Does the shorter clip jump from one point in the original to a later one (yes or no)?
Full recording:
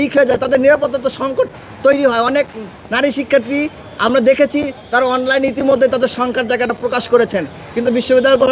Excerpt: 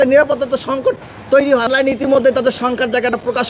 yes